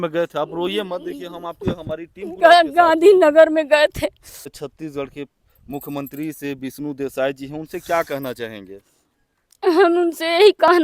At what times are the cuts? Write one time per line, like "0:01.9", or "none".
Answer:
0:04.5